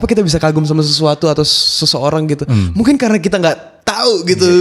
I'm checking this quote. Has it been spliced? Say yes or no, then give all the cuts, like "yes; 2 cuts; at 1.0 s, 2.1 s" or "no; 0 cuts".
no; 0 cuts